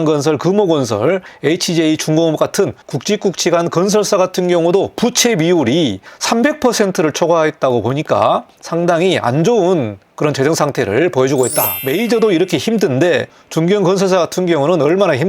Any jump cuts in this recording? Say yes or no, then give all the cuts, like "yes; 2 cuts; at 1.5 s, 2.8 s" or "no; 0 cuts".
yes; 5 cuts; at 1.3 s, 2.9 s, 6.1 s, 8.6 s, 11.8 s